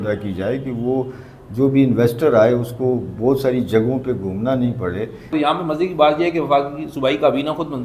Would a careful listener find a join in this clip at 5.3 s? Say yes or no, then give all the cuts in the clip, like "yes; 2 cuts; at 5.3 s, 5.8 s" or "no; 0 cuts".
yes; 1 cut; at 5.3 s